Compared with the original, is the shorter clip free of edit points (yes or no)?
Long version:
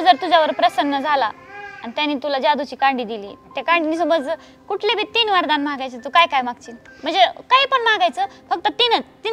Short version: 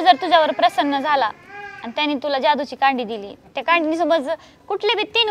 yes